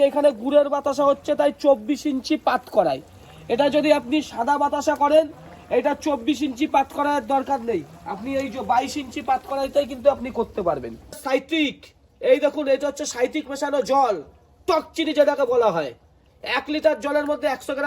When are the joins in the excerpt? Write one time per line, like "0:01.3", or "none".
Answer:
0:11.2